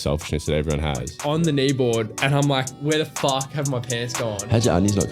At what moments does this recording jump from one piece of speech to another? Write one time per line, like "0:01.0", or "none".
0:01.1
0:02.7